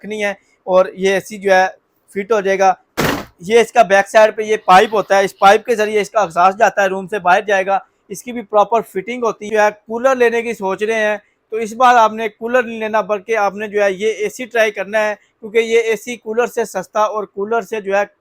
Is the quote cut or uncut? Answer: cut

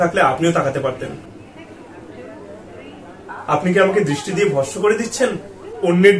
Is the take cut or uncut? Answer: uncut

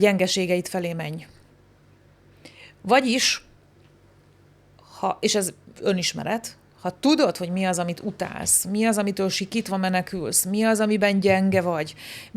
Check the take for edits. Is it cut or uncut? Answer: uncut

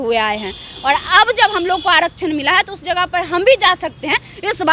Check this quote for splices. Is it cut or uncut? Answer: uncut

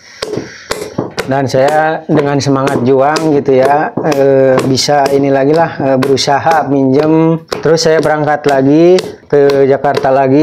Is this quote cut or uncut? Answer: cut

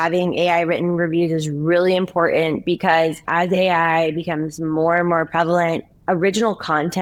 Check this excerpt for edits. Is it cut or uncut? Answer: uncut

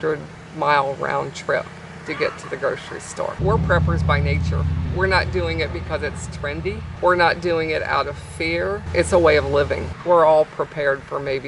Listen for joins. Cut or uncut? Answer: cut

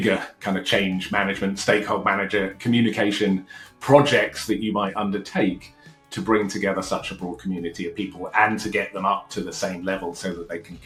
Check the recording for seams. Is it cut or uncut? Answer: uncut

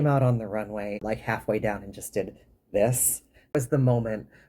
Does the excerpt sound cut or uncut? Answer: cut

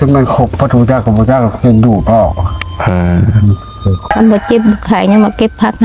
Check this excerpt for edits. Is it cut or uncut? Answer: cut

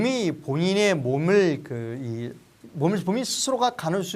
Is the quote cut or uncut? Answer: uncut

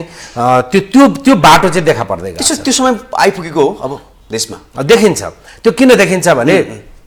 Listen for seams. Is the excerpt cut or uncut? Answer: uncut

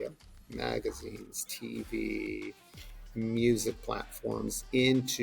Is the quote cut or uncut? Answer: uncut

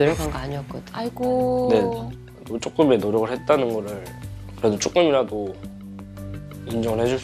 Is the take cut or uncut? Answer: uncut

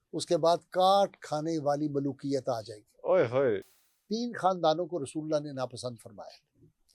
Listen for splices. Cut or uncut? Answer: cut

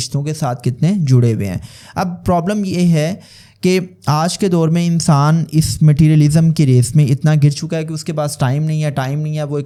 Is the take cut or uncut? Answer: uncut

